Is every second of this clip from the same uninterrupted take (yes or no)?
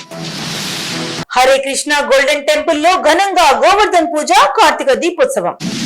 no